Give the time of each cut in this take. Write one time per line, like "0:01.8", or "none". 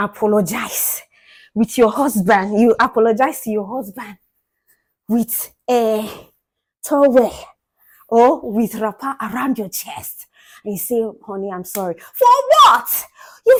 none